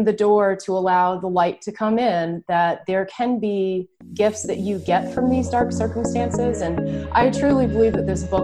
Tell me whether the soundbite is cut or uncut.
uncut